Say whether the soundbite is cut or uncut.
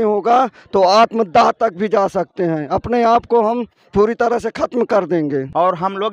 uncut